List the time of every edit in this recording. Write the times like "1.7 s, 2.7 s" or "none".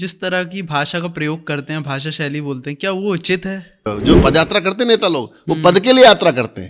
3.9 s